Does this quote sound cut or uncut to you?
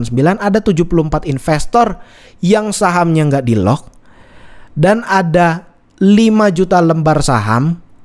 uncut